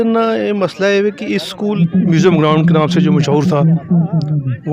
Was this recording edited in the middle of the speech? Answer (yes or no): yes